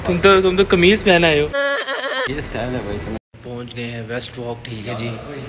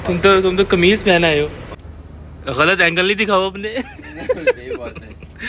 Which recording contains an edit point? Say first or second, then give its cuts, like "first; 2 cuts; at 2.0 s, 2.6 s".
second; 1 cut; at 1.8 s